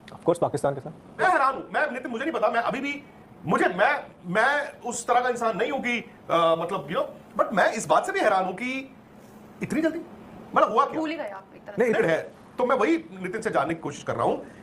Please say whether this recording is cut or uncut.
cut